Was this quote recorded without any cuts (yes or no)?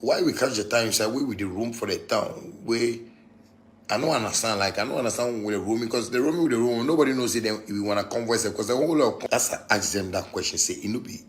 no